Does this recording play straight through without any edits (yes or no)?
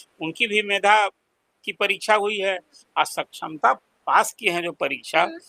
yes